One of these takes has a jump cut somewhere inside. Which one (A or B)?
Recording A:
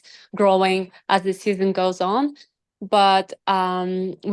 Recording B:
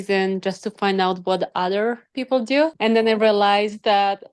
B